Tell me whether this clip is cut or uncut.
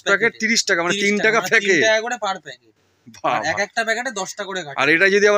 uncut